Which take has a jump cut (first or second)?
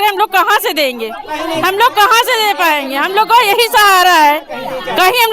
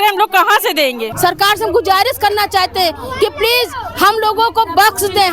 second